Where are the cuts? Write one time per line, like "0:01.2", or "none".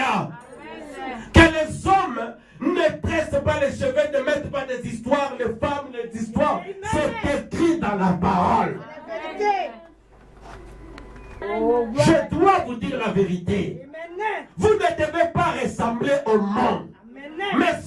0:11.4